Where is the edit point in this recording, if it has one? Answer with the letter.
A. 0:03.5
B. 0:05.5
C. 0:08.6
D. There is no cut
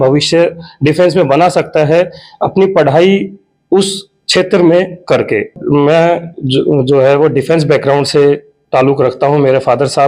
B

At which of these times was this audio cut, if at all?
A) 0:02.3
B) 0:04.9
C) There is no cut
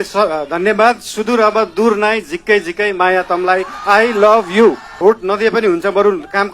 B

